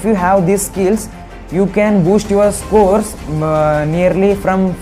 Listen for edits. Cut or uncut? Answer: uncut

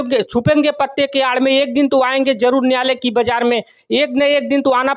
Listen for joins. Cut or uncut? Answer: uncut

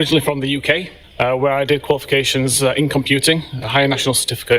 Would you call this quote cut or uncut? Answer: cut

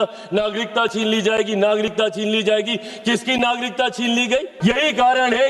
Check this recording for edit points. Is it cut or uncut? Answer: cut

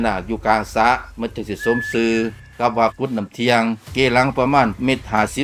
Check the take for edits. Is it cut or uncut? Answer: uncut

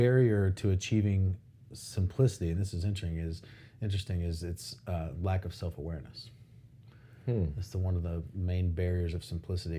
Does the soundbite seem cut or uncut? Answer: uncut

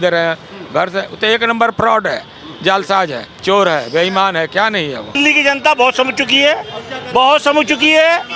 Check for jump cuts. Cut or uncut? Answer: cut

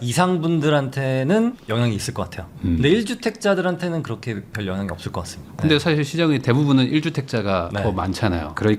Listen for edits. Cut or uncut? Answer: uncut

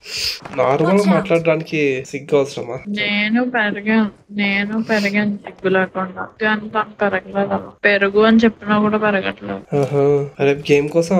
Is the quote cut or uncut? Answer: uncut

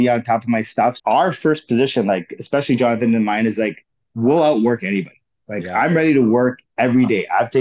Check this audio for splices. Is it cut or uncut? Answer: cut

